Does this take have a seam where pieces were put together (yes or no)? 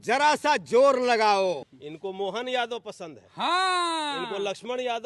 yes